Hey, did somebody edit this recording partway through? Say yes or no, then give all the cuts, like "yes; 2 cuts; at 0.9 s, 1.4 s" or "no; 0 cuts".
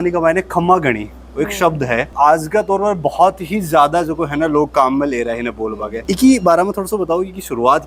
yes; 2 cuts; at 2.1 s, 5.9 s